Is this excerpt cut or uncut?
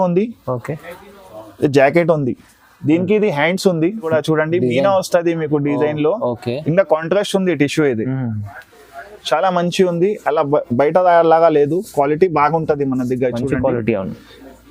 cut